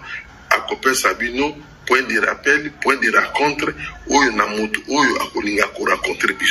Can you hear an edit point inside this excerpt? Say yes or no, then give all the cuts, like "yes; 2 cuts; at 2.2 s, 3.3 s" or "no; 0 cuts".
no; 0 cuts